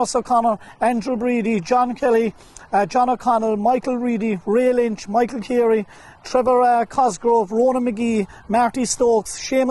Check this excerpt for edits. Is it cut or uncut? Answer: uncut